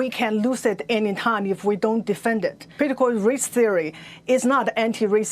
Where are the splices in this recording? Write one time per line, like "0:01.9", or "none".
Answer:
0:02.7